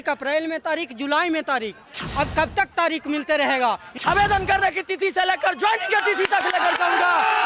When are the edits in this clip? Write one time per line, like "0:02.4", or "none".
0:03.9